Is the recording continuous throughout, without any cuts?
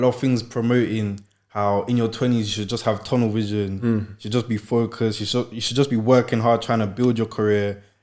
yes; 0 cuts

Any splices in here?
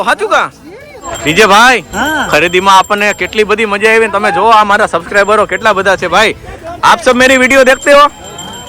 yes; 1 cut; at 1.0 s

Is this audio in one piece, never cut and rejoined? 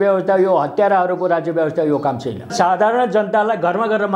no; 1 cut; at 2.5 s

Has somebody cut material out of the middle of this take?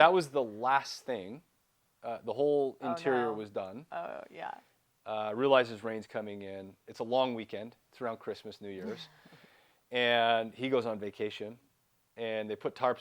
yes; 1 cut; at 4.7 s

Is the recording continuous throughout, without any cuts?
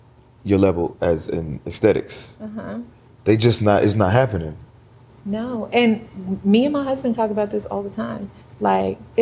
yes; 0 cuts

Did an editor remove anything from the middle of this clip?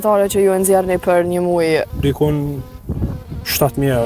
yes; 1 cut; at 1.9 s

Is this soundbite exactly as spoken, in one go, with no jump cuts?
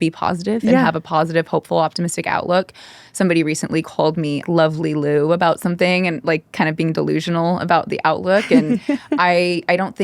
no; 1 cut; at 4.4 s

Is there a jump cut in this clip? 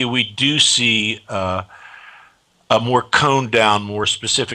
yes; 1 cut; at 3.1 s

